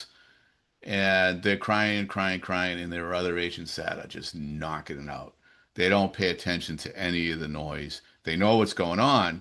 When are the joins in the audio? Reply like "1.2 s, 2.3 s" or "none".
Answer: none